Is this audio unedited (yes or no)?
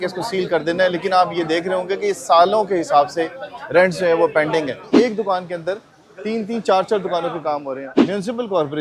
no